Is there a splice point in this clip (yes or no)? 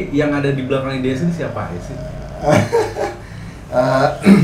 no